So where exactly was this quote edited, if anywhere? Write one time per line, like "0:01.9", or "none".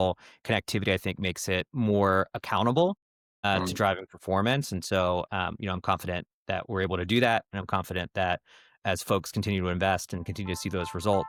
none

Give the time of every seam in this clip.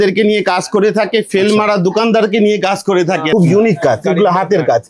0:03.2

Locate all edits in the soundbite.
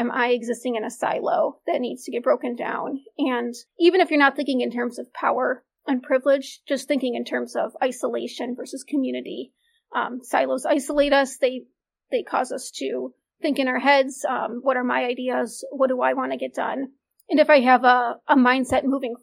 0:03.6

